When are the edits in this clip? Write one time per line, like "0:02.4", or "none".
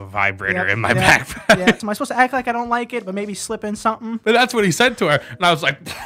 0:01.8
0:04.2